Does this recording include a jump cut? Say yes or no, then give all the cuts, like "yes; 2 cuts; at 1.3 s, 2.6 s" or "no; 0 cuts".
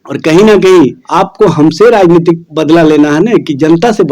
yes; 2 cuts; at 1.0 s, 2.5 s